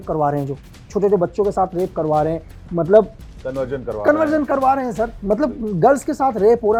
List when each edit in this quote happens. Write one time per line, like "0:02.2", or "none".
none